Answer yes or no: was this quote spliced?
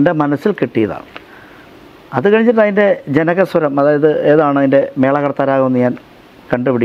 no